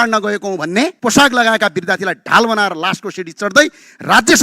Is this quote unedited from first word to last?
no; 1 cut; at 1.0 s

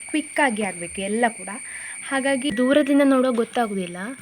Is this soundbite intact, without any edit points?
no; 1 cut; at 2.5 s

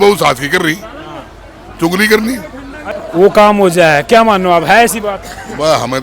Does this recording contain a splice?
yes; 1 cut; at 3.0 s

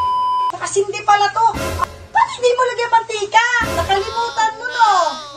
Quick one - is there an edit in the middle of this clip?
yes; 1 cut; at 1.8 s

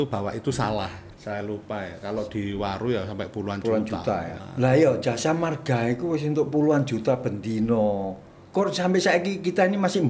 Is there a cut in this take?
yes; 2 cuts; at 1.1 s, 4.4 s

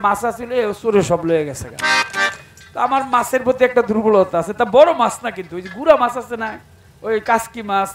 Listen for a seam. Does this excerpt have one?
no; 0 cuts

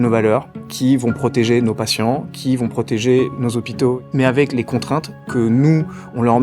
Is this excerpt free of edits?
yes; 0 cuts

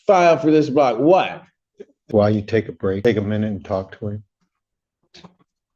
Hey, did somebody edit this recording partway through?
yes; 2 cuts; at 2.0 s, 3.0 s

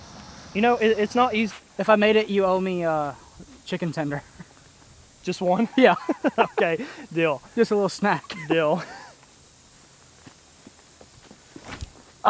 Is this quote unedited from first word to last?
no; 1 cut; at 1.5 s

